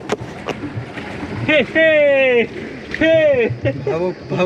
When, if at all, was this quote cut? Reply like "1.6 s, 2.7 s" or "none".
2.7 s